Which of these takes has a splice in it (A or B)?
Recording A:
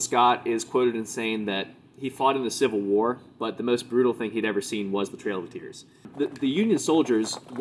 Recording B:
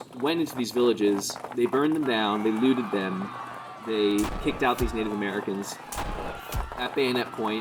A